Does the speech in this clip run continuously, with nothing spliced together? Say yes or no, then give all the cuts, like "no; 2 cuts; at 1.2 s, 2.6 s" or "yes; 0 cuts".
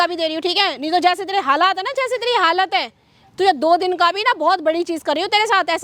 yes; 0 cuts